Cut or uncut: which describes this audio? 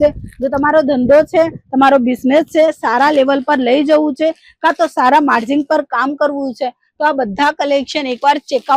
uncut